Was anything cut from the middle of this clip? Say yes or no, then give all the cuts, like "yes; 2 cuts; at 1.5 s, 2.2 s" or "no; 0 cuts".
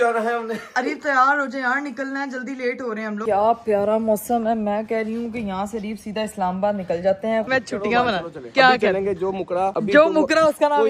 yes; 2 cuts; at 3.2 s, 7.5 s